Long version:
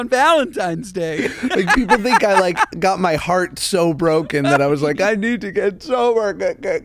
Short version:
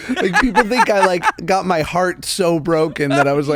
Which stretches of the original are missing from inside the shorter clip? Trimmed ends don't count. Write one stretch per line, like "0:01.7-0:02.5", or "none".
none